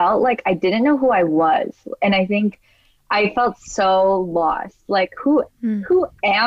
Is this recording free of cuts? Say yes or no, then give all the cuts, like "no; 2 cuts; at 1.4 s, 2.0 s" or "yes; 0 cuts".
yes; 0 cuts